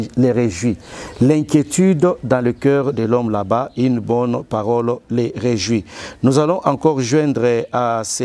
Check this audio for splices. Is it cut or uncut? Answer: uncut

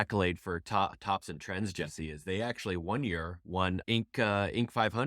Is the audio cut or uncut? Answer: cut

